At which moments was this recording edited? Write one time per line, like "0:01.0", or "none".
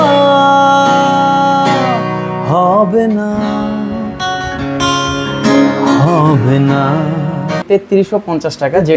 0:07.6